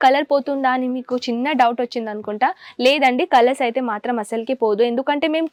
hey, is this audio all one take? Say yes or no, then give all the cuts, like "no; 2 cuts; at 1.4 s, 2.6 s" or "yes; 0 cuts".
yes; 0 cuts